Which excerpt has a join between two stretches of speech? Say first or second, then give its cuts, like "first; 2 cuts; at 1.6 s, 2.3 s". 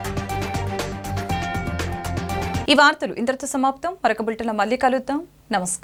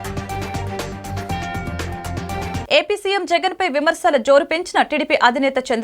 second; 1 cut; at 2.6 s